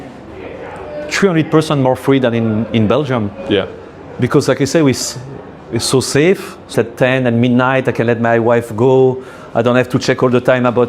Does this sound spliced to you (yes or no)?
yes